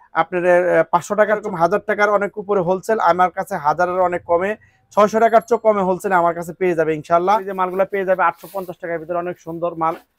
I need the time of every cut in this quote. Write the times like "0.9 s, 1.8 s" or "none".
1.5 s, 7.5 s

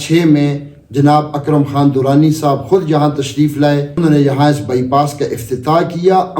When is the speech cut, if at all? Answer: 3.9 s

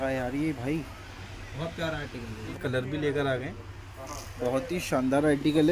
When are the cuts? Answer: 2.5 s

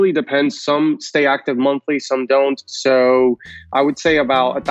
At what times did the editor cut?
none

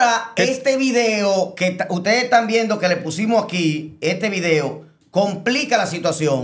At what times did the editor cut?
none

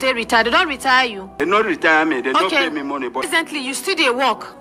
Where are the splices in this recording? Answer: 1.4 s, 3.3 s

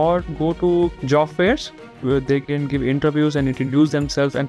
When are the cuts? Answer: 1.0 s, 1.9 s

